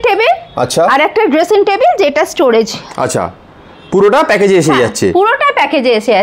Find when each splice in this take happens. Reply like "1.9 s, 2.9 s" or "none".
none

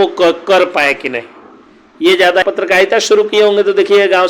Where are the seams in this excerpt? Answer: 2.4 s

